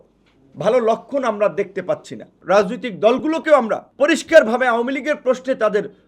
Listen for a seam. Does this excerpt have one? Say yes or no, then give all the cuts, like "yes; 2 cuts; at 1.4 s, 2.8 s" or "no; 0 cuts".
yes; 2 cuts; at 2.3 s, 3.8 s